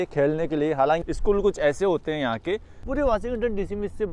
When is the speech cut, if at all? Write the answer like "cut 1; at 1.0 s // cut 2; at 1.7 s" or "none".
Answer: cut 1; at 1.0 s // cut 2; at 2.8 s